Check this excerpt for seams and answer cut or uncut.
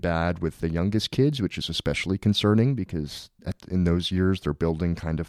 uncut